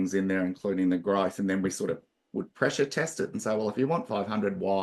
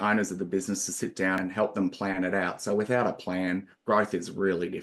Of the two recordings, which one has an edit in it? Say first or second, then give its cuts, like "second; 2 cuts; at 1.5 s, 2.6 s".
second; 1 cut; at 1.4 s